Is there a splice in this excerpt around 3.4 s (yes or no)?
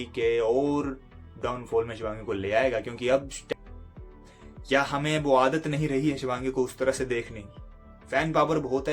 yes